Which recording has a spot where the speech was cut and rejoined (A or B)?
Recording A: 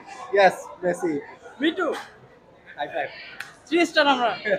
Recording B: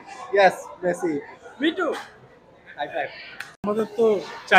B